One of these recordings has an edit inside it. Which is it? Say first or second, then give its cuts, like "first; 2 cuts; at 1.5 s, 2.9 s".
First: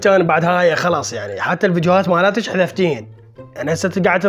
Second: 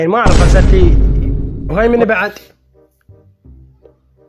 second; 1 cut; at 1.6 s